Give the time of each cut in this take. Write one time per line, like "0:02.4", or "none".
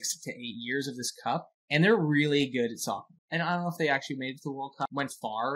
0:01.5
0:03.1
0:04.9